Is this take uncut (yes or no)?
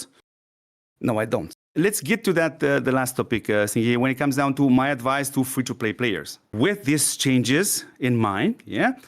no